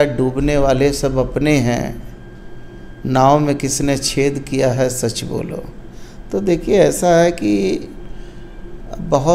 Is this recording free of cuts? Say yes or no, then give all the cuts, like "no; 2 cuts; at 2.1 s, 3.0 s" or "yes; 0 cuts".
yes; 0 cuts